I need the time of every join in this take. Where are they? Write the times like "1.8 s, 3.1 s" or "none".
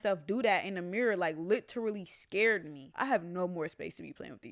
2.8 s